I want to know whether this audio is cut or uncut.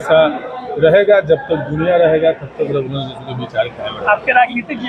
uncut